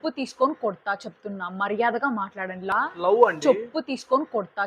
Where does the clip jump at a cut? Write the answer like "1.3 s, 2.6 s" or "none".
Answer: 2.7 s